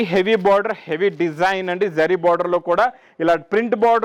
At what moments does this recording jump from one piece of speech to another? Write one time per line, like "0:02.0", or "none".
none

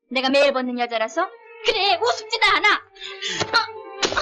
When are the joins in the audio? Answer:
0:01.5

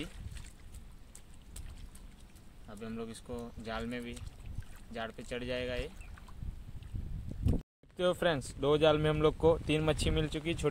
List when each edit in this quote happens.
0:07.8

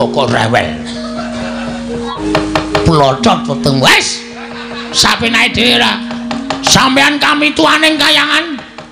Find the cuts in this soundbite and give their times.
0:02.1

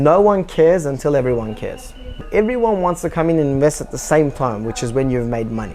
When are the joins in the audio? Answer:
0:02.3

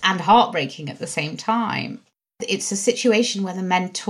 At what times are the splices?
0:02.3

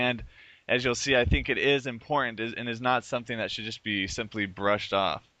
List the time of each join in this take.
0:01.5

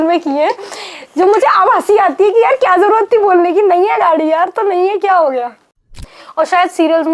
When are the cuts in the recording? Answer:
0:05.7

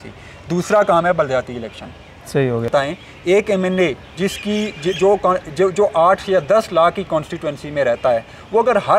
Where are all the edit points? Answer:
0:02.7

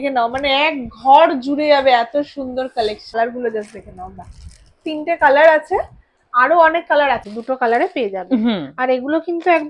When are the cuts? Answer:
0:03.1
0:07.3

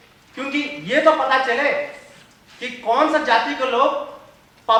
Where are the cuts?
none

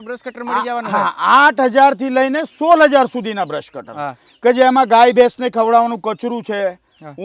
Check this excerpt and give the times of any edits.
none

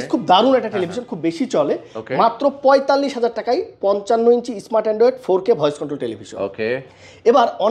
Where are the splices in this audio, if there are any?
none

